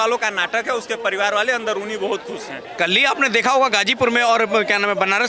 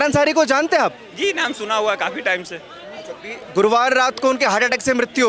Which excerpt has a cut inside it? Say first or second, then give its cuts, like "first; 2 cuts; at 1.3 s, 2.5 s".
first; 1 cut; at 2.7 s